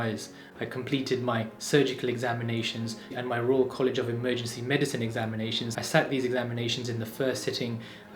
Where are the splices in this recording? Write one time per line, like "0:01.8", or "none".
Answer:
0:03.0